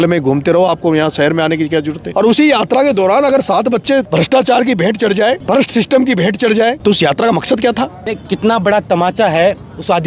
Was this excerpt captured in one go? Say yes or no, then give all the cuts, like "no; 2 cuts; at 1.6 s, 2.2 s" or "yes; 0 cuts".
no; 5 cuts; at 2.0 s, 4.1 s, 5.4 s, 6.8 s, 8.1 s